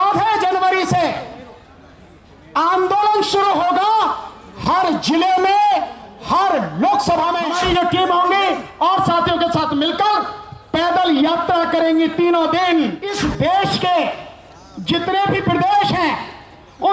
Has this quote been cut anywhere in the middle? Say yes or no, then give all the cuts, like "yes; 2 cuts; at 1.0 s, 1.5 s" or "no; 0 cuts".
yes; 2 cuts; at 7.5 s, 13.1 s